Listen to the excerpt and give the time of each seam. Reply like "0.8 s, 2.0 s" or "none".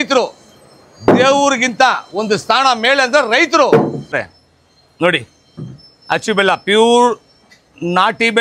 4.1 s